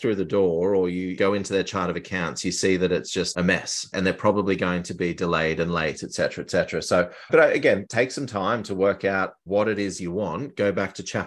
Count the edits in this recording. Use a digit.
3